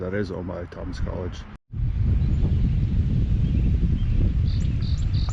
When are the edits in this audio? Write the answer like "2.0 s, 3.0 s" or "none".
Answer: 1.6 s